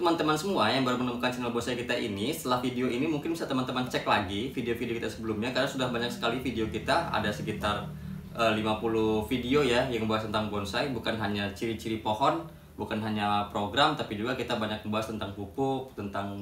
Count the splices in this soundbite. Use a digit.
0